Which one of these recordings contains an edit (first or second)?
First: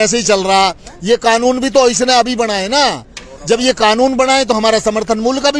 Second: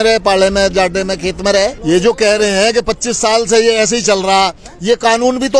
second